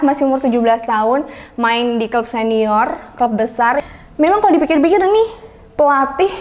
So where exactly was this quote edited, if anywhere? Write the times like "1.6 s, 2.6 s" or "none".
3.8 s